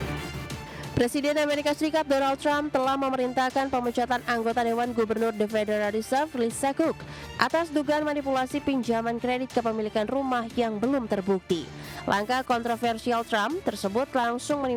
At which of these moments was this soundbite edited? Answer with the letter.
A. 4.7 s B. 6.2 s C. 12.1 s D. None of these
D